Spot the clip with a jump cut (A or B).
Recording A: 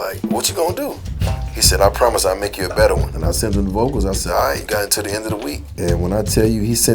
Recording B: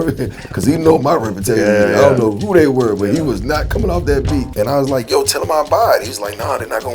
B